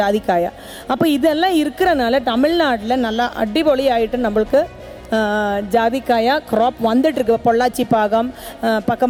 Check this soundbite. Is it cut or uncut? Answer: uncut